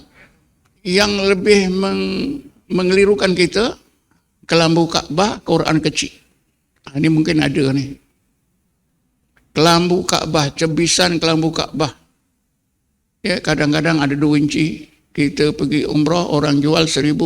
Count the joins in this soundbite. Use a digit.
0